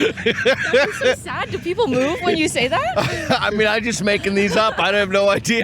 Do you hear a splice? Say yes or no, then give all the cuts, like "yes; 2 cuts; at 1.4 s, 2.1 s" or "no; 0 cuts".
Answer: no; 0 cuts